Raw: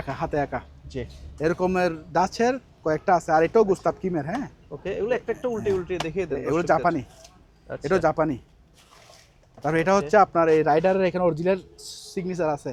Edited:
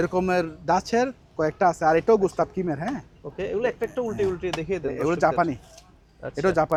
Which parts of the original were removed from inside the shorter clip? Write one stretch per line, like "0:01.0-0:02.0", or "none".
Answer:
none